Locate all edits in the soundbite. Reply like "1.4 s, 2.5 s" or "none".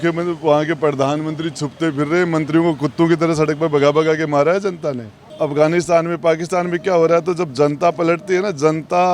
5.3 s